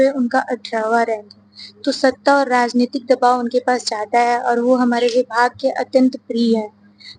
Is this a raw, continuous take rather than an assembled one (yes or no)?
yes